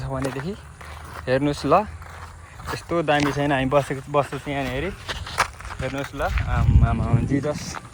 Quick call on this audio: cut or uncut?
uncut